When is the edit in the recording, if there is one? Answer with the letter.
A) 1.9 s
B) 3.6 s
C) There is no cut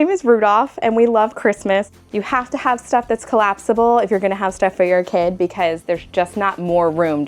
A